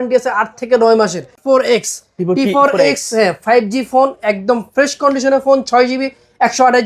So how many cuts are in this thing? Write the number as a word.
one